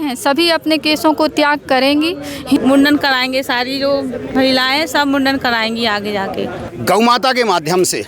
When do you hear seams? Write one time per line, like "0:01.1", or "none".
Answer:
0:02.6
0:06.6